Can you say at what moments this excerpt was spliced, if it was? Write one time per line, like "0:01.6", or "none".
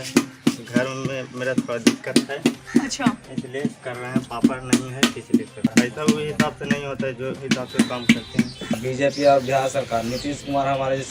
0:05.7
0:08.8